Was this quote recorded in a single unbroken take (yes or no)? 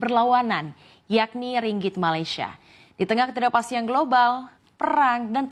yes